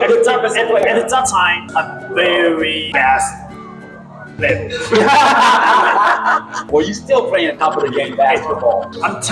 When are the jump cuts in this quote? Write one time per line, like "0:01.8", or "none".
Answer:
none